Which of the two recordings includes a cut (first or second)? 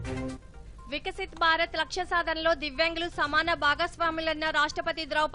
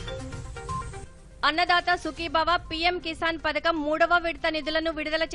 second